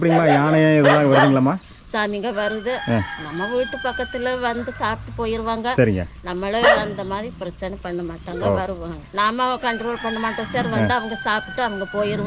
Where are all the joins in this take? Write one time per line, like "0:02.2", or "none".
0:01.7
0:09.0